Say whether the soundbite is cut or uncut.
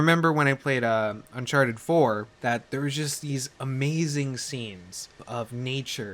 cut